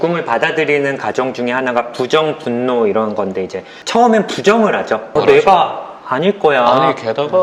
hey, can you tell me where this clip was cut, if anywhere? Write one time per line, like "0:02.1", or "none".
none